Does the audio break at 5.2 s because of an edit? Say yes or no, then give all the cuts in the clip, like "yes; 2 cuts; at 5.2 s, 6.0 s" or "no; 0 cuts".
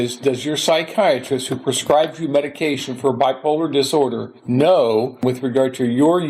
yes; 2 cuts; at 4.3 s, 5.2 s